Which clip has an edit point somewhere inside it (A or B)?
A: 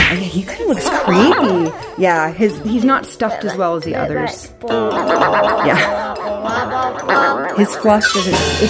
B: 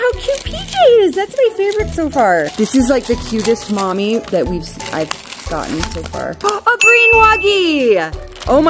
B